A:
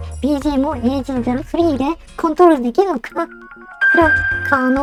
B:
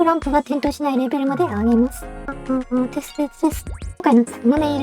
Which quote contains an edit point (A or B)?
B